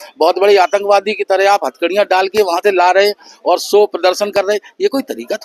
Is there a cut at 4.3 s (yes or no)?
no